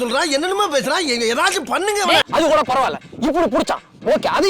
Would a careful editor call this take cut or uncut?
cut